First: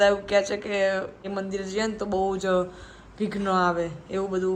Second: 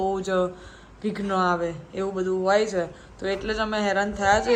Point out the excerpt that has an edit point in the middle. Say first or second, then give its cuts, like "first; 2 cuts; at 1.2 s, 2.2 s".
first; 1 cut; at 1.3 s